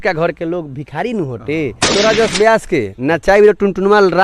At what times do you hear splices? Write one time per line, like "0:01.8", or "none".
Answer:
0:01.9